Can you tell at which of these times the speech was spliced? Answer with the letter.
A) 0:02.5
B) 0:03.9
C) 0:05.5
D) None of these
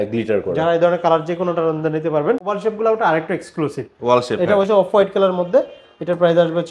A